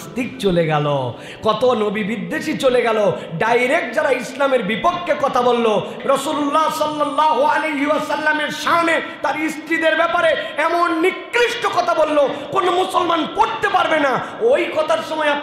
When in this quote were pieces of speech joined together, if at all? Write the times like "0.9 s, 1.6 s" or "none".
5.9 s